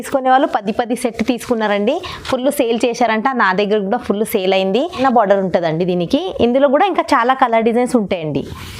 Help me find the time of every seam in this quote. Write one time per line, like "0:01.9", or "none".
0:05.0